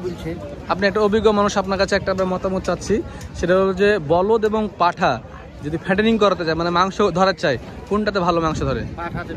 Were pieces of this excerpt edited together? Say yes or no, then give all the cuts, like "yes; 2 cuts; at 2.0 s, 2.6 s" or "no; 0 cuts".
no; 0 cuts